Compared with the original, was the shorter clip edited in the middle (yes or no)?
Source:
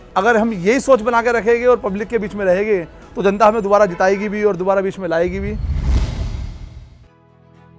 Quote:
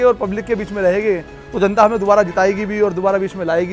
no